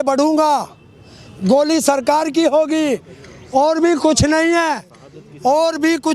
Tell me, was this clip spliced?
no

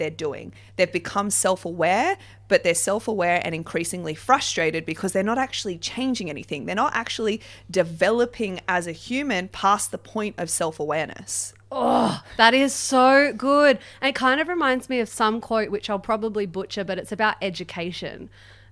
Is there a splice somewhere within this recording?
no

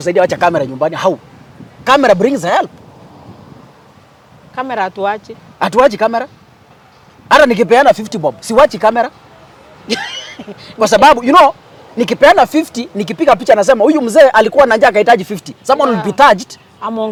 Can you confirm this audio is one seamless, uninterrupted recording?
yes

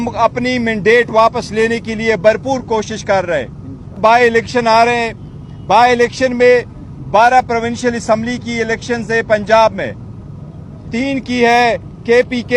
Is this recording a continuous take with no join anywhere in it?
no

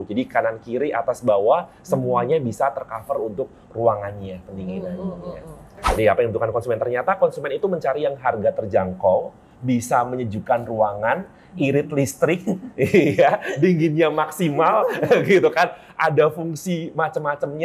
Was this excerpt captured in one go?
no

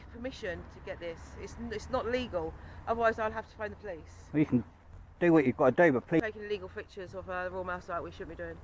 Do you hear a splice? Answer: yes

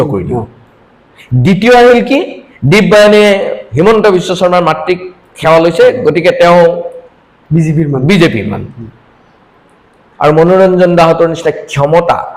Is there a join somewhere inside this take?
no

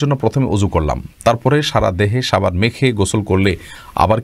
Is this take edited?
no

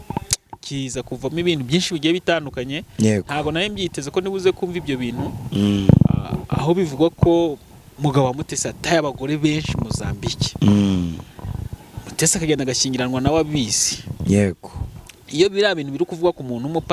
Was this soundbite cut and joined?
no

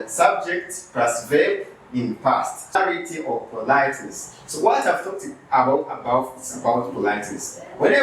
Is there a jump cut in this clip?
yes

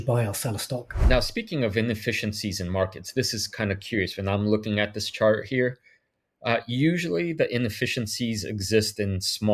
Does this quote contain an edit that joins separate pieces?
yes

